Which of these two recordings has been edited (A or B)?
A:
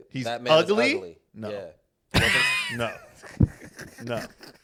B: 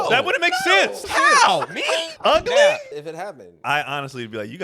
B